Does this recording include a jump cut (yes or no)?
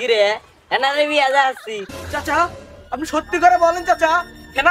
yes